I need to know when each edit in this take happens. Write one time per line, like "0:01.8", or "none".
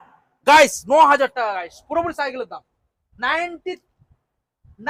none